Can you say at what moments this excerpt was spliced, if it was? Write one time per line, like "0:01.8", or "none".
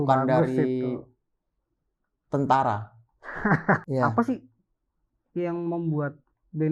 0:03.8